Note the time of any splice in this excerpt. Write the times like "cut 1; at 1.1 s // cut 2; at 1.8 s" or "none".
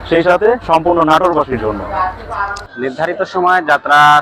cut 1; at 2.6 s

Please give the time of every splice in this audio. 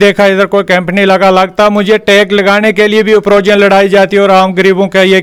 none

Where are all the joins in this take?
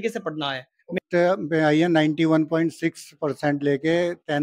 cut 1; at 0.9 s

